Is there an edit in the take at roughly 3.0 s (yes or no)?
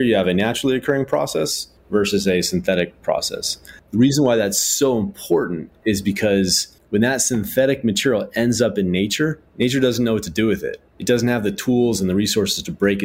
no